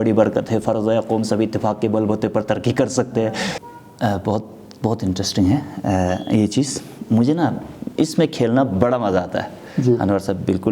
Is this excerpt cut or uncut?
cut